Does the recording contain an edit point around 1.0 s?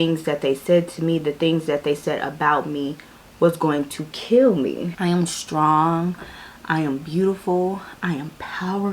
no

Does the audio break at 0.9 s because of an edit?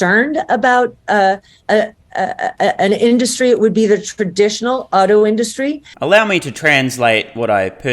no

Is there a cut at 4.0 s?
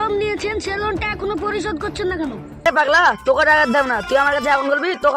no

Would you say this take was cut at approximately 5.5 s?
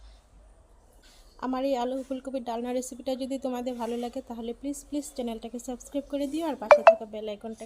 no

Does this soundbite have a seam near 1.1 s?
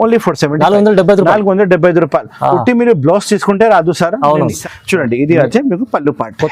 no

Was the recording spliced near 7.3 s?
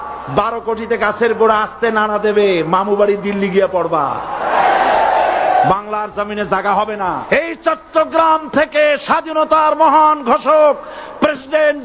yes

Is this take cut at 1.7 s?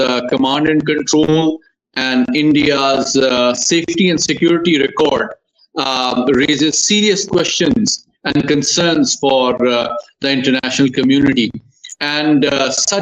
no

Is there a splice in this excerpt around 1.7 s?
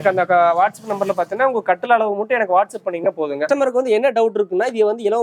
no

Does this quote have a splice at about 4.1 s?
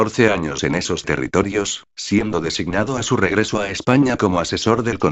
yes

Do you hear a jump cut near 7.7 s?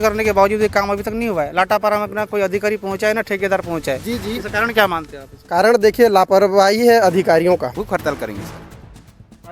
yes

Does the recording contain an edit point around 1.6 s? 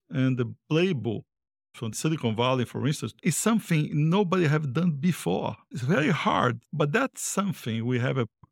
no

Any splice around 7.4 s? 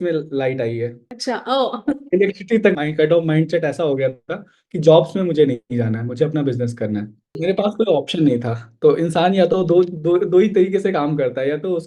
yes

